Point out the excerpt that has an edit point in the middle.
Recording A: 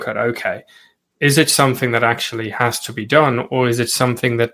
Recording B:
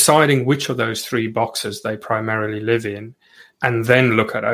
A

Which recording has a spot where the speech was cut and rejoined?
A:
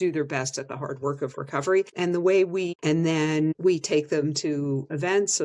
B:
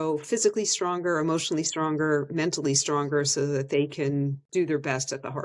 A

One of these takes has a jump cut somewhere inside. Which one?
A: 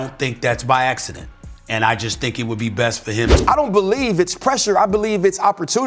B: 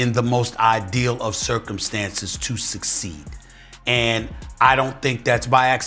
A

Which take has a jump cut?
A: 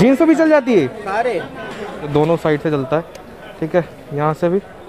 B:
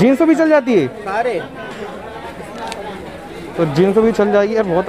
A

